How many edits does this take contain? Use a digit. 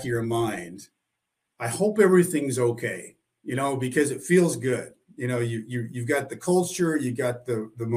0